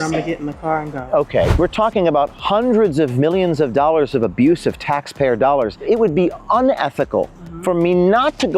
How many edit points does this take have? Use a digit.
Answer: 2